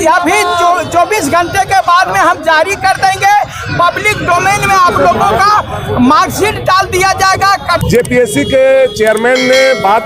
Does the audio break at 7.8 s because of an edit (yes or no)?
yes